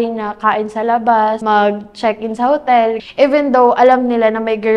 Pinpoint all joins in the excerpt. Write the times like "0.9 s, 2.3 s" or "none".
1.4 s, 3.0 s